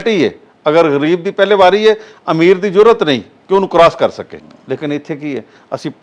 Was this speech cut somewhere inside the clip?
yes; 1 cut; at 4.4 s

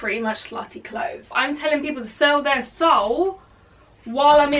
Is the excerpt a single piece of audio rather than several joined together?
no; 1 cut; at 1.4 s

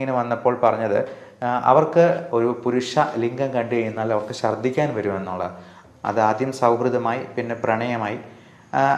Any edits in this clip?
yes; 2 cuts; at 2.2 s, 5.7 s

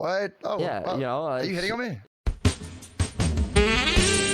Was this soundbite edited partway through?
no; 0 cuts

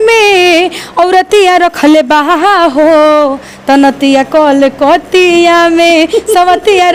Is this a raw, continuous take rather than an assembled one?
yes; 0 cuts

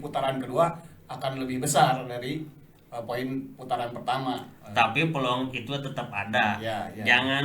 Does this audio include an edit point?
no; 0 cuts

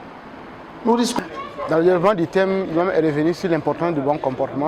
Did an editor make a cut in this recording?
yes; 1 cut; at 1.2 s

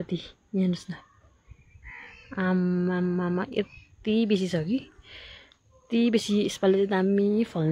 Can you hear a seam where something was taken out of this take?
no; 0 cuts

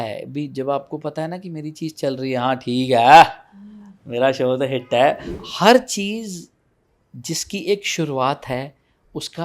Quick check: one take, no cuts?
no; 1 cut; at 5.3 s

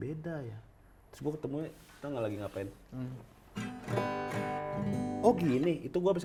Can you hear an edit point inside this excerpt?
no; 0 cuts

